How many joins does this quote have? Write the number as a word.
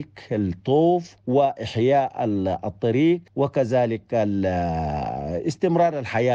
two